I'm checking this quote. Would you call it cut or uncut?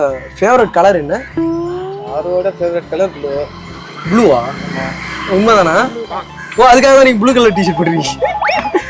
cut